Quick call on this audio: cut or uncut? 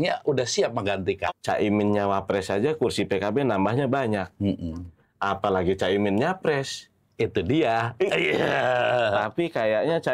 cut